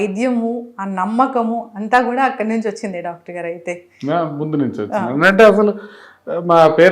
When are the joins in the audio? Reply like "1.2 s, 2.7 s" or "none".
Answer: none